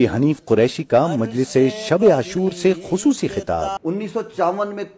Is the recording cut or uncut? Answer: cut